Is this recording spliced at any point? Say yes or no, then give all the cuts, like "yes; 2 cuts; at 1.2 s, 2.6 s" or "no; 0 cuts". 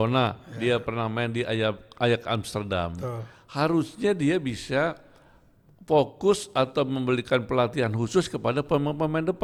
no; 0 cuts